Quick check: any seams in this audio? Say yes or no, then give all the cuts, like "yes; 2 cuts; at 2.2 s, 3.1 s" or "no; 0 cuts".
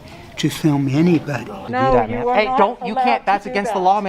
yes; 1 cut; at 1.7 s